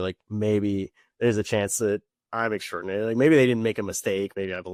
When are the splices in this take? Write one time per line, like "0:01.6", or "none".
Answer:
none